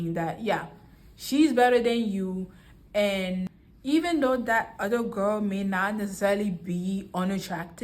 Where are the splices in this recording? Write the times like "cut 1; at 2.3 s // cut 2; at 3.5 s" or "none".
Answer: cut 1; at 3.6 s